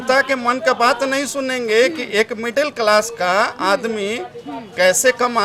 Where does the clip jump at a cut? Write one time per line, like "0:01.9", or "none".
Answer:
none